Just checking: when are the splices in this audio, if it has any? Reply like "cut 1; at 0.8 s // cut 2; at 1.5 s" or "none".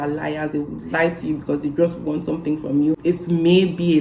cut 1; at 3.0 s